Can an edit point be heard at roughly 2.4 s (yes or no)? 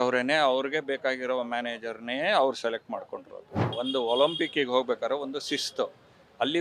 no